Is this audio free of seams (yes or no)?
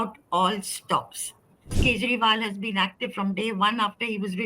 no